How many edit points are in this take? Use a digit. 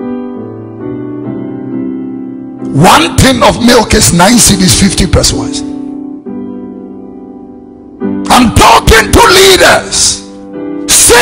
0